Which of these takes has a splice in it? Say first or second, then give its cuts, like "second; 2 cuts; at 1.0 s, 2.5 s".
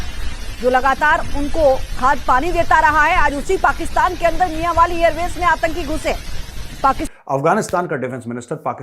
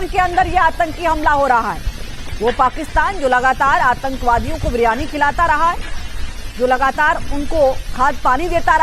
first; 1 cut; at 7.1 s